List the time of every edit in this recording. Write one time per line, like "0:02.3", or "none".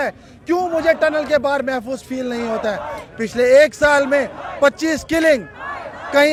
none